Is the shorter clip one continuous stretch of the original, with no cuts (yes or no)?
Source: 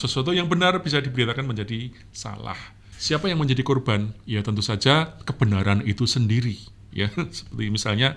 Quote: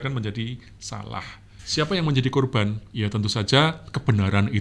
yes